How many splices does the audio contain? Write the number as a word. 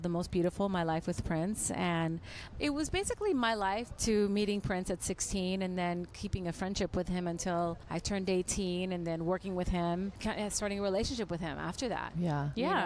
four